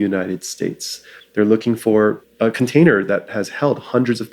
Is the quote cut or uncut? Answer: cut